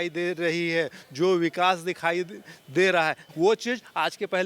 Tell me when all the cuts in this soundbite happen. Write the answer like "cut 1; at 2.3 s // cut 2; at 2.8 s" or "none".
cut 1; at 3.2 s